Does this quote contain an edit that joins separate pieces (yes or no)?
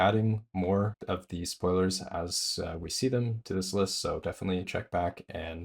yes